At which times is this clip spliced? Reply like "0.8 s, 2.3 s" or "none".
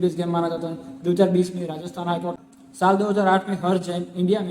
2.5 s